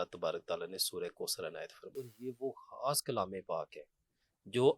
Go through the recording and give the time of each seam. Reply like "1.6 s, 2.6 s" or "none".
2.1 s